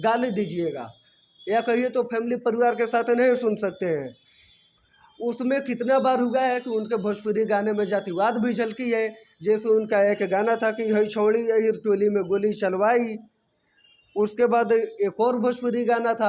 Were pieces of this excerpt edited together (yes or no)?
no